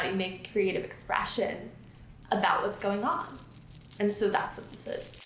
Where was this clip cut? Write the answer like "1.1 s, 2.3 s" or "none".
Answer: none